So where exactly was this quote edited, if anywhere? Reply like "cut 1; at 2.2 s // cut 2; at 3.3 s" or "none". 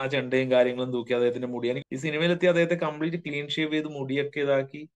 cut 1; at 1.8 s